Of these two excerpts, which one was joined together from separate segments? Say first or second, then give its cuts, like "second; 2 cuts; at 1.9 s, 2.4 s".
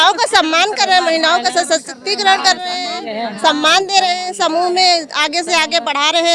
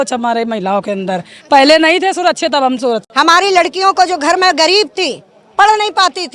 second; 1 cut; at 3.0 s